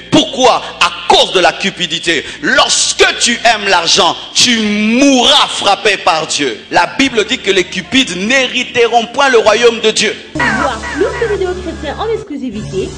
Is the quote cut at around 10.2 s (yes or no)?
yes